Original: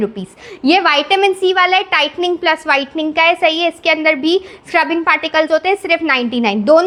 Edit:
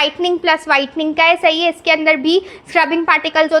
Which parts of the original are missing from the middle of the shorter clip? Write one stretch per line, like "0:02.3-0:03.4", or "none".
none